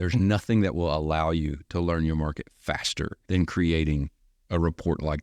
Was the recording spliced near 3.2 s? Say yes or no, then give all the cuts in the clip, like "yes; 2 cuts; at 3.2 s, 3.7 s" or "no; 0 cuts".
yes; 1 cut; at 3.2 s